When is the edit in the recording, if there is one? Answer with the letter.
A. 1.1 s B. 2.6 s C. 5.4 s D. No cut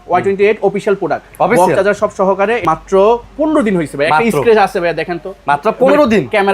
B